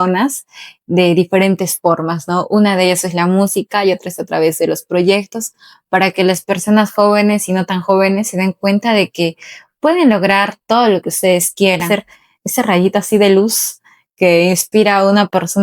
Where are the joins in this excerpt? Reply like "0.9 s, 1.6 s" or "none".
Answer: 11.9 s